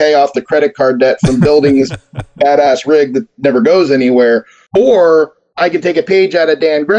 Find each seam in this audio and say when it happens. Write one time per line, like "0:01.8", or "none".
0:04.6
0:05.4